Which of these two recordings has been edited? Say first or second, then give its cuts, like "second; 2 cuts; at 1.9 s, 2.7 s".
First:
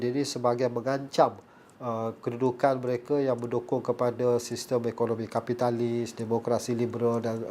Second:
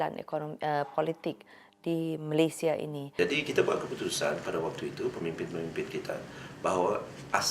second; 1 cut; at 3.0 s